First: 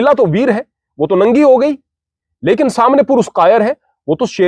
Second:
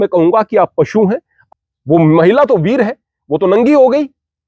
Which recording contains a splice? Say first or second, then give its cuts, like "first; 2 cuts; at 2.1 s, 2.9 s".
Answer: second; 1 cut; at 1.4 s